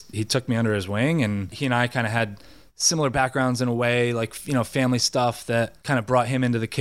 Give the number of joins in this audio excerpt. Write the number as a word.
two